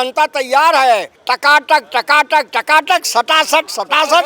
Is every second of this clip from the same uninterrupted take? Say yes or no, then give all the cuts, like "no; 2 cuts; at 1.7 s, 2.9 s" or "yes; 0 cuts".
no; 1 cut; at 1.1 s